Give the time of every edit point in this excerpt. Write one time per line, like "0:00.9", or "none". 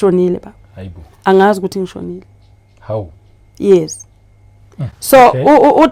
none